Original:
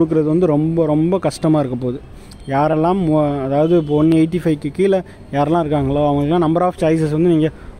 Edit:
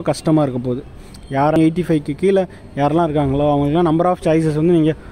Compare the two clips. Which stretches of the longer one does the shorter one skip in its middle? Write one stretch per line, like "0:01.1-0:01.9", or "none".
0:02.7-0:04.1